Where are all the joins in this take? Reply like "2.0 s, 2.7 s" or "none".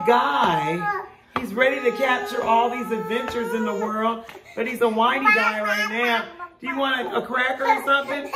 none